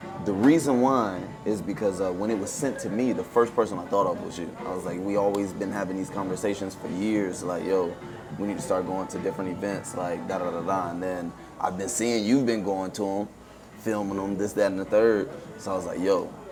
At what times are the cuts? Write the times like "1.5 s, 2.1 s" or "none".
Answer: none